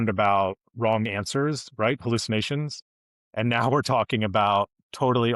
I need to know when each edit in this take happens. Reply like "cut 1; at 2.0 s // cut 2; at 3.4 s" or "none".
none

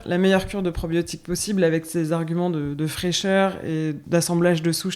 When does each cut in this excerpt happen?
cut 1; at 4.0 s

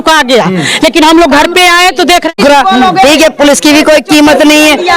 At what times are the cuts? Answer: cut 1; at 2.3 s

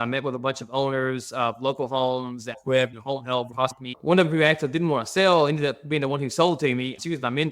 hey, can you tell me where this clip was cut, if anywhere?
cut 1; at 3.9 s

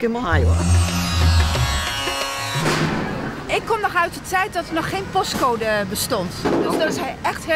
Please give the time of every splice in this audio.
none

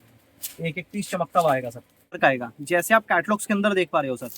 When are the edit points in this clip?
cut 1; at 2.2 s

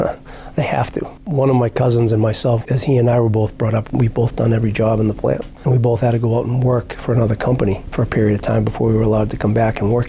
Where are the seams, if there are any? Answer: cut 1; at 1.2 s // cut 2; at 2.6 s // cut 3; at 3.9 s // cut 4; at 5.5 s

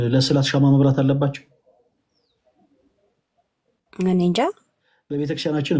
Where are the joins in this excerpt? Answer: cut 1; at 4.4 s

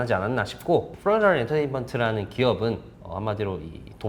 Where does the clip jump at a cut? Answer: cut 1; at 0.9 s // cut 2; at 2.9 s

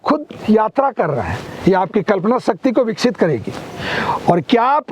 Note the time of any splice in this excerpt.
none

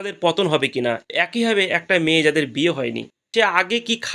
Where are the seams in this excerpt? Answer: cut 1; at 1.0 s // cut 2; at 3.1 s

